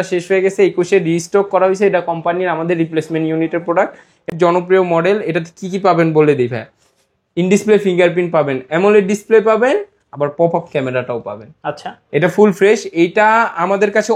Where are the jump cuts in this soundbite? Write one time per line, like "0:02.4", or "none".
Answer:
0:04.3

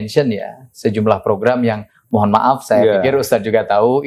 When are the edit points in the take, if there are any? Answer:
none

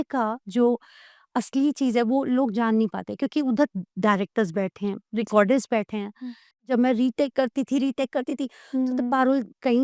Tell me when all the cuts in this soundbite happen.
0:06.7

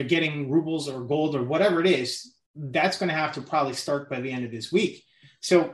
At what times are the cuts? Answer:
none

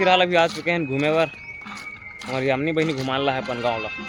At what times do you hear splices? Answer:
none

